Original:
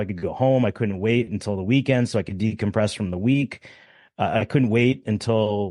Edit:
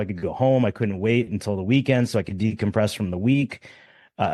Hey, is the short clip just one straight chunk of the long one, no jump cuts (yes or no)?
yes